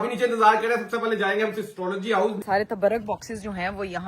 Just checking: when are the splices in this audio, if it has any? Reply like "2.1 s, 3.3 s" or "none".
2.4 s